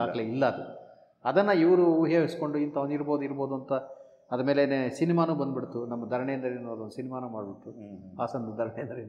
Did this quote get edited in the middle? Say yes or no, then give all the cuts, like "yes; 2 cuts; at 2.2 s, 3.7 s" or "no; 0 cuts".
no; 0 cuts